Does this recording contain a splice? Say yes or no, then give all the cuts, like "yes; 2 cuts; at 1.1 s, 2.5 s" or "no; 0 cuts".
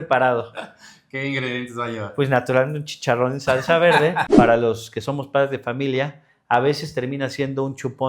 yes; 1 cut; at 4.3 s